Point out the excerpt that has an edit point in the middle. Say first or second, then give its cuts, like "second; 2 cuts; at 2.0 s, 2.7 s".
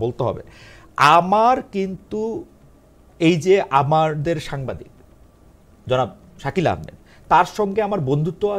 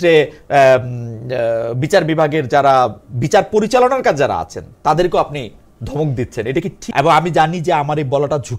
second; 1 cut; at 6.8 s